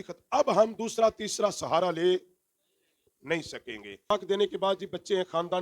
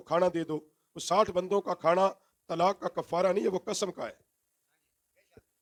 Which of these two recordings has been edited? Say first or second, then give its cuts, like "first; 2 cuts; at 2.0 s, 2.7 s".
first; 1 cut; at 4.1 s